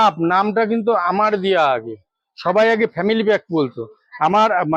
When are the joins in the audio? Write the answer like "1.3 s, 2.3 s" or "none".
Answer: none